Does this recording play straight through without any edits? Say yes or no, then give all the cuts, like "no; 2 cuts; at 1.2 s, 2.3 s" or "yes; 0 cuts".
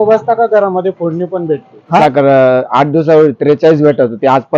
no; 1 cut; at 2.0 s